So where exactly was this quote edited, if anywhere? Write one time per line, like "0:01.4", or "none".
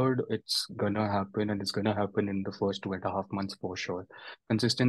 none